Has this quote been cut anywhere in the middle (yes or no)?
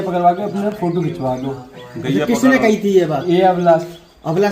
no